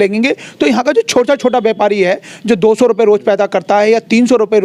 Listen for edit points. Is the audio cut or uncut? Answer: uncut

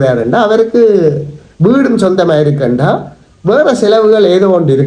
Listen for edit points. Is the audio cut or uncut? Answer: uncut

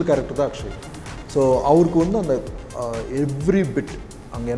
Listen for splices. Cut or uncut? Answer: uncut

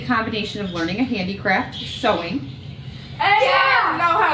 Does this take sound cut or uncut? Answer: uncut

